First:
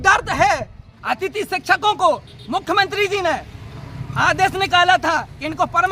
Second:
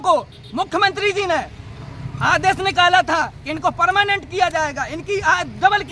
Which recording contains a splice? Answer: first; 1 cut; at 0.9 s

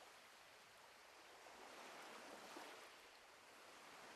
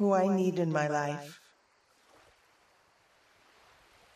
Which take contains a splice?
second; 1 cut; at 1.4 s

